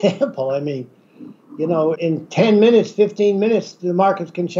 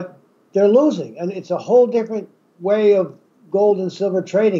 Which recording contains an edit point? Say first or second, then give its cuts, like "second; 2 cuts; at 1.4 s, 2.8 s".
first; 1 cut; at 2.0 s